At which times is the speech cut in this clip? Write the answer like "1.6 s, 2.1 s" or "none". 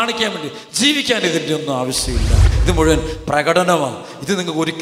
2.5 s

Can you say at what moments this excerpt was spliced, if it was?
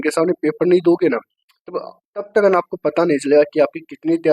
none

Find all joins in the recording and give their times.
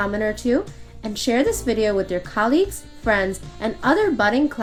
none

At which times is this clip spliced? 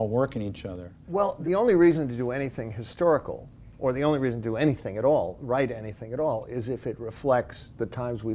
1.4 s

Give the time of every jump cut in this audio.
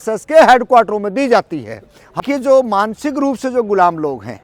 2.2 s

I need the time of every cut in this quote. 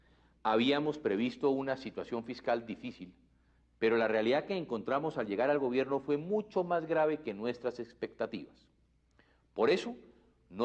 none

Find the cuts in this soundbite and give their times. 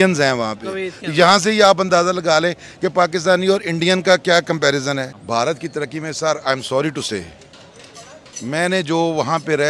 5.2 s

